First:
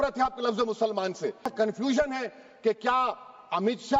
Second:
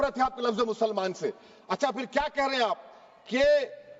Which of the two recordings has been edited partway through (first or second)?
first